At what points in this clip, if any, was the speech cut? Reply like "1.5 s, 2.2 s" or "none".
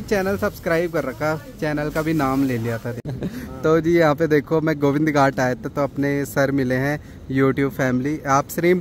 3.0 s

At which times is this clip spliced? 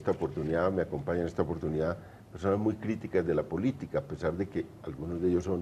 none

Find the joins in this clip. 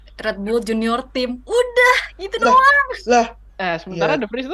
3.4 s

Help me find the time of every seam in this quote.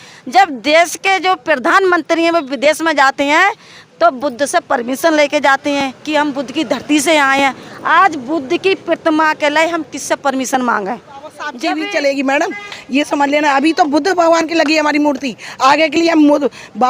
11.5 s

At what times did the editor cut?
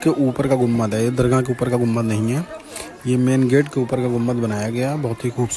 none

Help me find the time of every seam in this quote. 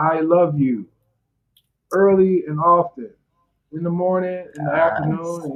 none

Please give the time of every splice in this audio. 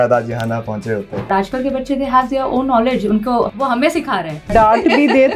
1.3 s, 4.5 s

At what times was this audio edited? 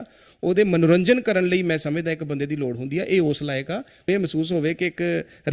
4.1 s

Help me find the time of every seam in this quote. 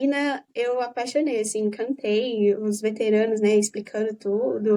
none

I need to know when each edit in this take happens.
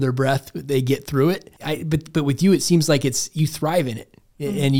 1.5 s

